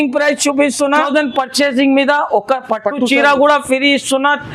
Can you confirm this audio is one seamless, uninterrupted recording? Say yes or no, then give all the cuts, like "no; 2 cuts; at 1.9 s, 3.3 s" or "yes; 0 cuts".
no; 1 cut; at 1.1 s